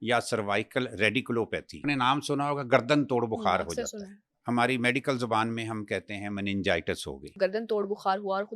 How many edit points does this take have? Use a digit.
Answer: 2